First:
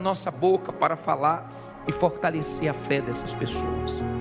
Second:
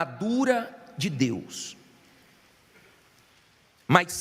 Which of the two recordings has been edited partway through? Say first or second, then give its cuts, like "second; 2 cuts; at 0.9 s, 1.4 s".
second; 1 cut; at 1.5 s